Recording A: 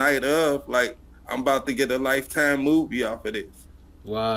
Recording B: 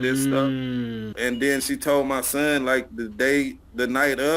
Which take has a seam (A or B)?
B